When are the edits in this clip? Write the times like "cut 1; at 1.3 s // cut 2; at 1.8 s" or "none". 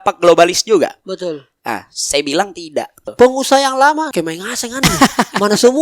cut 1; at 3.1 s // cut 2; at 4.1 s